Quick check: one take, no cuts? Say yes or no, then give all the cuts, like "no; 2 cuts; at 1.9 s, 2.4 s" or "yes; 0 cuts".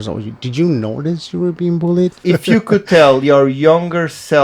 no; 1 cut; at 2.2 s